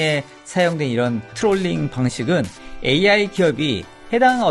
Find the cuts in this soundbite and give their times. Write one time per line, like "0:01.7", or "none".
none